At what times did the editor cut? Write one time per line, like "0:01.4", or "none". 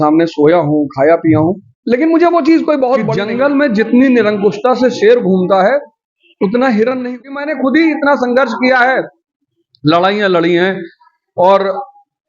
0:03.1
0:07.3